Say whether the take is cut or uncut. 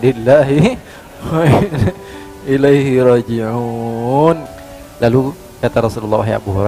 cut